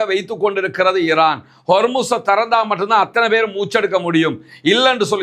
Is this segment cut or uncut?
uncut